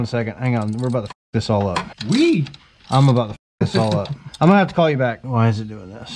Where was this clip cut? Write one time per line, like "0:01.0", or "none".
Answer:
0:04.2
0:05.2